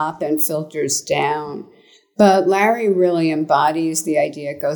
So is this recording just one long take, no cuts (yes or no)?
yes